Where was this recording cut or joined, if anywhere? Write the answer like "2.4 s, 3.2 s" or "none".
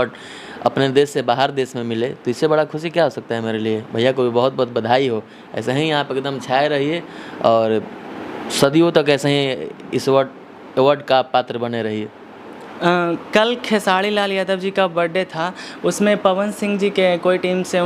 none